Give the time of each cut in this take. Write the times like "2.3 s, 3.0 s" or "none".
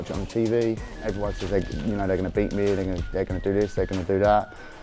0.9 s